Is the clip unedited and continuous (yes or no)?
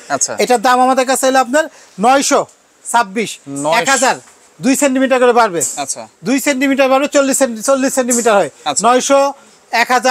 yes